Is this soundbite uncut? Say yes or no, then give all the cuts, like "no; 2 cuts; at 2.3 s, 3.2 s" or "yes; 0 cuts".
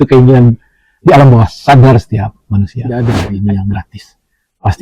no; 1 cut; at 2.8 s